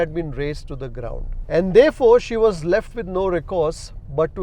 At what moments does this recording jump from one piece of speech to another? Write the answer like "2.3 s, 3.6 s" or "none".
none